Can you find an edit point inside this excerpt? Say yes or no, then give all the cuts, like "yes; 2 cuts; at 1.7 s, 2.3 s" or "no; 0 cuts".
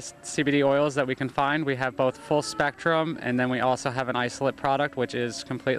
no; 0 cuts